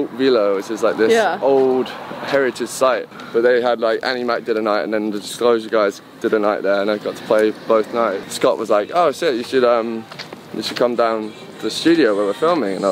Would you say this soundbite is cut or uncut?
cut